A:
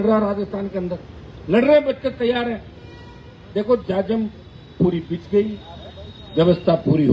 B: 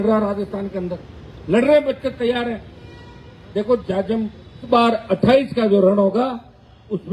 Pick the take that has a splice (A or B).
B